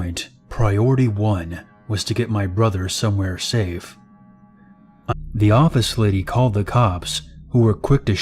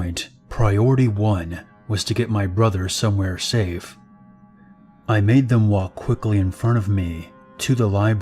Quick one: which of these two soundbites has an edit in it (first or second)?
second